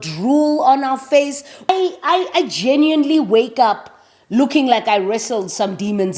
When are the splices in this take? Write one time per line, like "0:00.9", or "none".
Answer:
0:01.5